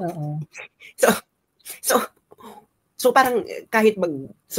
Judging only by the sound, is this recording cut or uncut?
uncut